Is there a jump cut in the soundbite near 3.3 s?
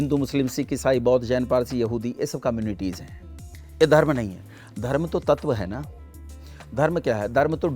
no; 0 cuts

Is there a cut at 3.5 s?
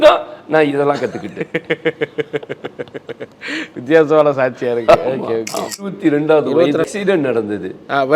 no; 2 cuts; at 5.8 s, 6.9 s

